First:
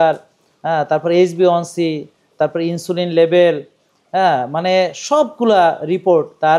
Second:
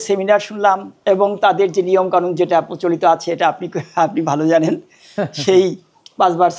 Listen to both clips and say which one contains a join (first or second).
second